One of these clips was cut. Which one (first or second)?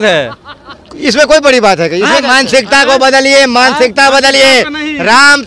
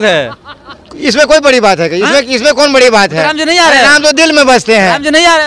first